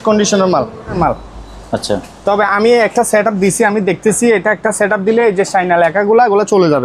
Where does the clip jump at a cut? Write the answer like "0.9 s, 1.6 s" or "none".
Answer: 1.0 s